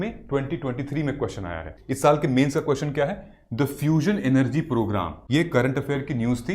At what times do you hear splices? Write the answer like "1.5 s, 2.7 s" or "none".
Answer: 1.7 s, 5.2 s